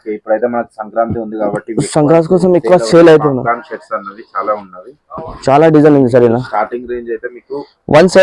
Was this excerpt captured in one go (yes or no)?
yes